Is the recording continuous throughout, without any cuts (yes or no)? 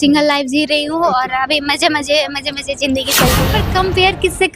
no